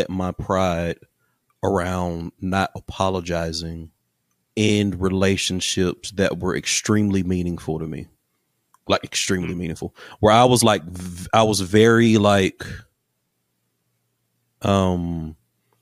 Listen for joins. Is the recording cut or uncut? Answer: uncut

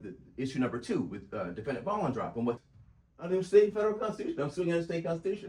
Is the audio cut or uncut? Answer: cut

